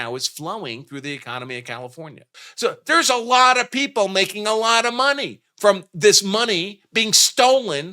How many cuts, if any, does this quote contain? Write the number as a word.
one